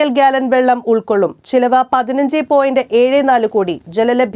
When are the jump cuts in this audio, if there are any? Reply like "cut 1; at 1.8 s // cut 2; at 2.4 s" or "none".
none